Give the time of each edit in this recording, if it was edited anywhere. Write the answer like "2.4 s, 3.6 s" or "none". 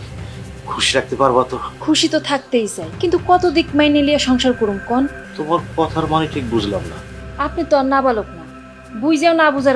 1.7 s, 2.8 s, 5.3 s